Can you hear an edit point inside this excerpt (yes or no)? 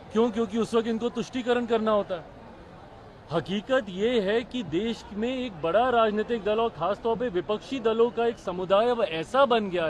no